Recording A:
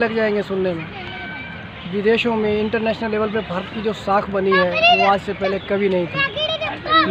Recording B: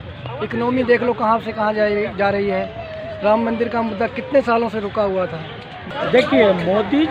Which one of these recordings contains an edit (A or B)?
B